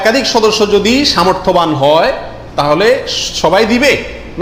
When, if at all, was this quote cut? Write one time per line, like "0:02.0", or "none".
none